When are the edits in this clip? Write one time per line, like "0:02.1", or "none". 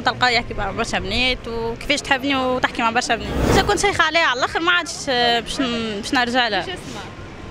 0:03.5